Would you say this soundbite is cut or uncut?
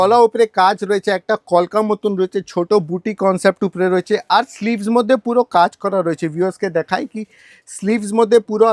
uncut